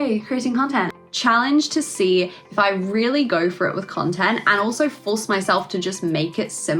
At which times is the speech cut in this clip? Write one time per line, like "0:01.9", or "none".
0:00.9